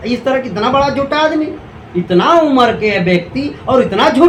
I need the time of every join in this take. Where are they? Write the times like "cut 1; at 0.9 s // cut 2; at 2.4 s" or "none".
none

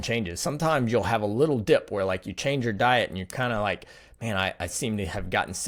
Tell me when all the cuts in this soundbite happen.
none

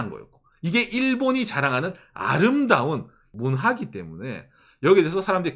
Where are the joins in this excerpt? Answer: cut 1; at 3.2 s

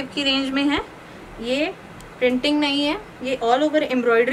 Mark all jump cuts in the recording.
none

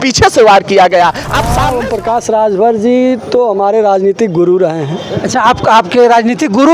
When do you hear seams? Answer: cut 1; at 1.5 s

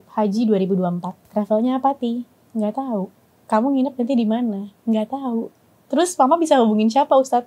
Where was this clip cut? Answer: cut 1; at 1.1 s

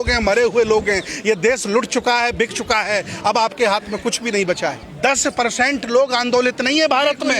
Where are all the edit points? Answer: cut 1; at 4.9 s

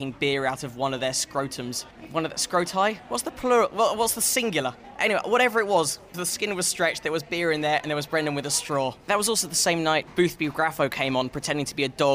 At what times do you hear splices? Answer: none

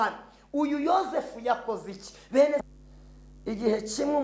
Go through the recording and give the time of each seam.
cut 1; at 2.6 s

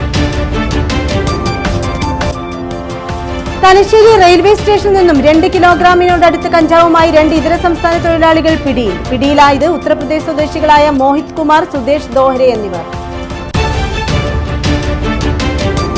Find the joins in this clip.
cut 1; at 2.3 s

